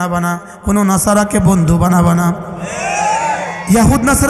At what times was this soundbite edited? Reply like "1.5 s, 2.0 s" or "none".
none